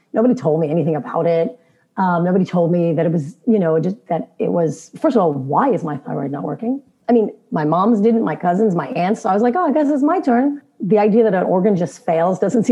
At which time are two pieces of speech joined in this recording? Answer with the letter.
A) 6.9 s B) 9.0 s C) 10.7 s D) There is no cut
C